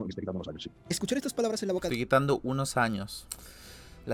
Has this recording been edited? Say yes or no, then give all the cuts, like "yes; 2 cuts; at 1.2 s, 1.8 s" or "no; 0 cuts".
no; 0 cuts